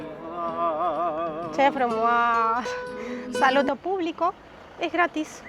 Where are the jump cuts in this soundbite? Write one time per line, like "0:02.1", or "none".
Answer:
0:03.7